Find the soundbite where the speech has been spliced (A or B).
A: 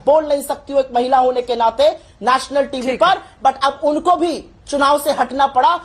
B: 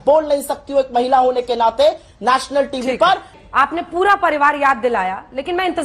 B